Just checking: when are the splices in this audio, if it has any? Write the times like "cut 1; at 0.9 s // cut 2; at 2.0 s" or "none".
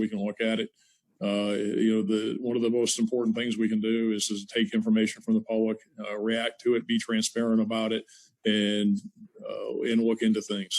none

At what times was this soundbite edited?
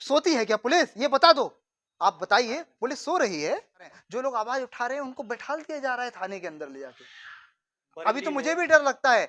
cut 1; at 4.0 s

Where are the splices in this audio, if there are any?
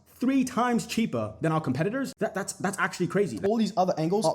cut 1; at 2.1 s // cut 2; at 3.3 s

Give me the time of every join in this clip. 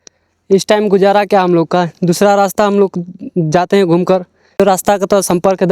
cut 1; at 4.6 s

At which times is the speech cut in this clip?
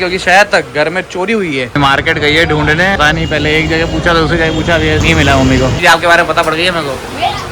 cut 1; at 1.7 s // cut 2; at 3.0 s // cut 3; at 5.0 s // cut 4; at 5.8 s

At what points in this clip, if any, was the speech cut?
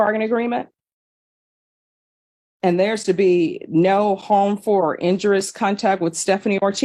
none

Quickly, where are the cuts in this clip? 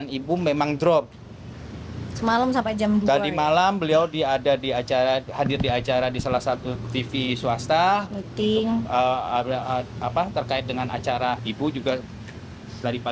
cut 1; at 11.5 s

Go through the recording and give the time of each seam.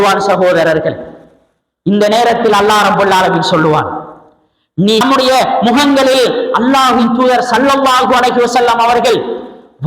cut 1; at 5.0 s

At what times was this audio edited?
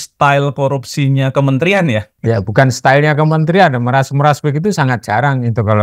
cut 1; at 2.2 s

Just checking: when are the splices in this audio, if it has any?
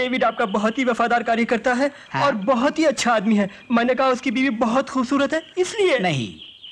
none

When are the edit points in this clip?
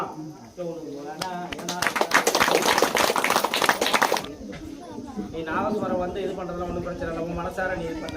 cut 1; at 4.2 s

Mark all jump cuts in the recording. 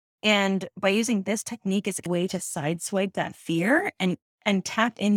cut 1; at 2.1 s

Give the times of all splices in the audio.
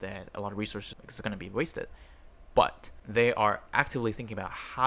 none

